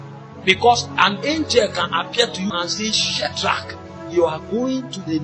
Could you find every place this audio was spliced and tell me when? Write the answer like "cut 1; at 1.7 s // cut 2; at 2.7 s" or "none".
cut 1; at 2.5 s